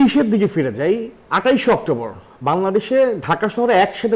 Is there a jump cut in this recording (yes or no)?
yes